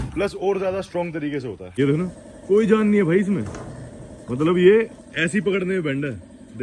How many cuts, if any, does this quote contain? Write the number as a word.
one